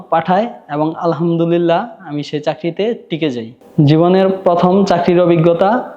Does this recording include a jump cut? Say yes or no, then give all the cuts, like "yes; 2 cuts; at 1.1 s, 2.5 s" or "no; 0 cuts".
no; 0 cuts